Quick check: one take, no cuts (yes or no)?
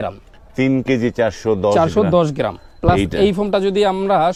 yes